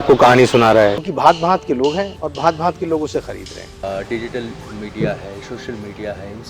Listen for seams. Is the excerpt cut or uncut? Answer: cut